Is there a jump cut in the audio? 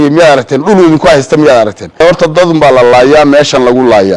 yes; 1 cut; at 2.0 s

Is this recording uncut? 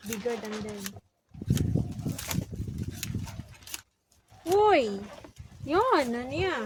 yes; 0 cuts

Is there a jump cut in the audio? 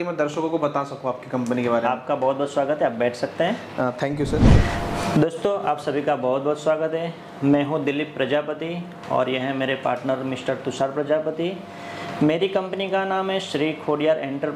yes; 1 cut; at 4.5 s

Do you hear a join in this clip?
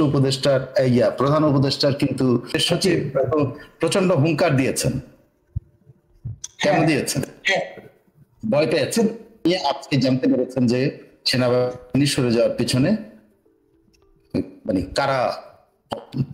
yes; 2 cuts; at 2.6 s, 9.5 s

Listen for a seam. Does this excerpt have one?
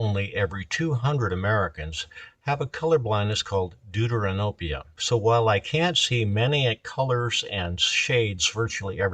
yes; 1 cut; at 4.9 s

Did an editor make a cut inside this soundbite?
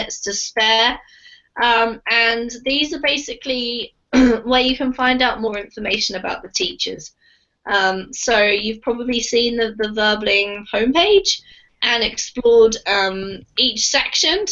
yes; 1 cut; at 7.7 s

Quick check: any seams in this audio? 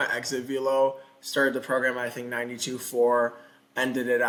no; 0 cuts

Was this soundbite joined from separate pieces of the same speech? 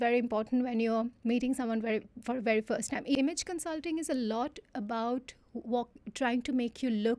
yes; 1 cut; at 3.1 s

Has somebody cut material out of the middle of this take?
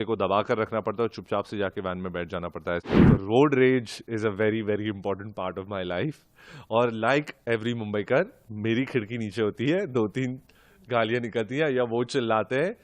yes; 1 cut; at 2.9 s

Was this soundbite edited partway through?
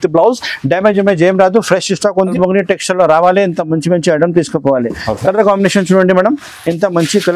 yes; 1 cut; at 2.3 s

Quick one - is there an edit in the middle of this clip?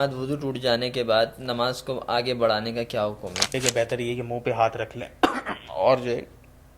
yes; 1 cut; at 3.5 s

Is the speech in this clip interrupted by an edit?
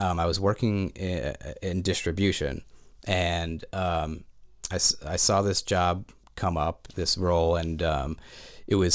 no; 0 cuts

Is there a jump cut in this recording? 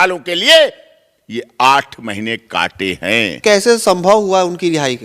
yes; 1 cut; at 3.3 s

